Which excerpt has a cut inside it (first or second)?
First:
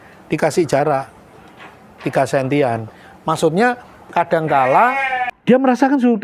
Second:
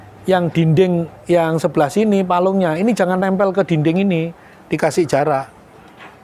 first